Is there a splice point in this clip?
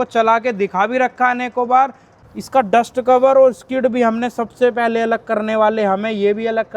yes; 1 cut; at 2.1 s

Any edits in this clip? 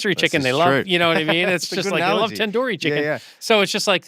no; 0 cuts

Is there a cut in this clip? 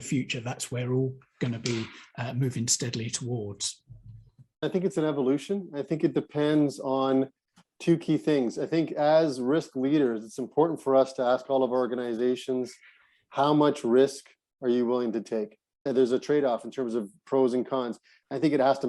yes; 2 cuts; at 4.6 s, 15.8 s

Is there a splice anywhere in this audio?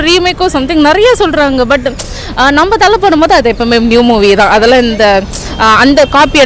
no; 0 cuts

